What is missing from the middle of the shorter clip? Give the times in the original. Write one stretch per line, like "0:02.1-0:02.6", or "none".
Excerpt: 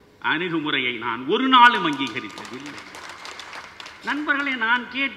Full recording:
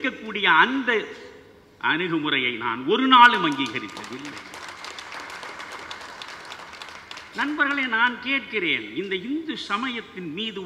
0:05.2-0:06.9